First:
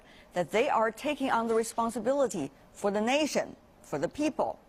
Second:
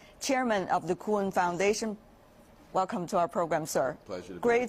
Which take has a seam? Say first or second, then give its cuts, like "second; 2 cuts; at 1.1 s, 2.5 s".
second; 1 cut; at 1.4 s